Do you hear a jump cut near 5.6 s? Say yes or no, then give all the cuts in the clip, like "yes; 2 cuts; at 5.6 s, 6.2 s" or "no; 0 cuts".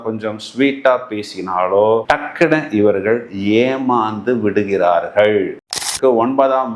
yes; 1 cut; at 5.6 s